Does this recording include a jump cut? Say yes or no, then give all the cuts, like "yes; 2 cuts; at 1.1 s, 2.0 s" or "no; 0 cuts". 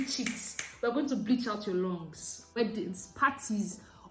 yes; 1 cut; at 2.6 s